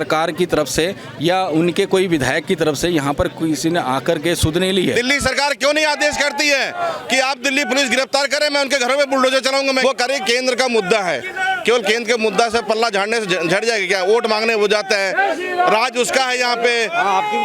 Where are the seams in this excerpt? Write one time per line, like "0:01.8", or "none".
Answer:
0:04.9
0:09.8